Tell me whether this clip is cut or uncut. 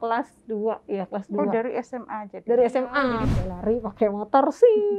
cut